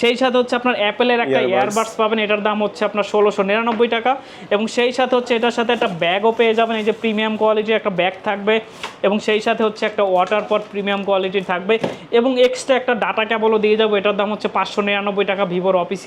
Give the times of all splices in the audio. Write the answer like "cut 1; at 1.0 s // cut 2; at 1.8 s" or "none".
none